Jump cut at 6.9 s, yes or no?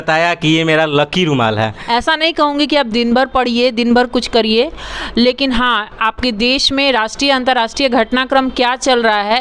no